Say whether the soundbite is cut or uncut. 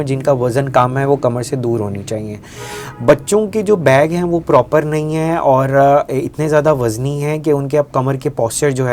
uncut